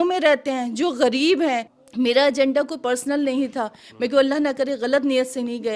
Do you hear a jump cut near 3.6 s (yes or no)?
no